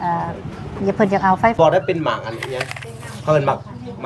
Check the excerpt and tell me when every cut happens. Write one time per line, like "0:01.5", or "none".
0:01.6